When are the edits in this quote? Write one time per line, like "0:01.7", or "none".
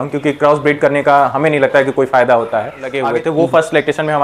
0:03.0